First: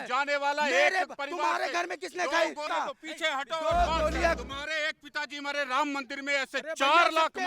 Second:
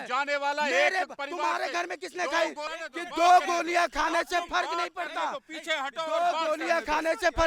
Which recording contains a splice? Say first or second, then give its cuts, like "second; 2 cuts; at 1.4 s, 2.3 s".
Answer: first; 2 cuts; at 2.6 s, 4.4 s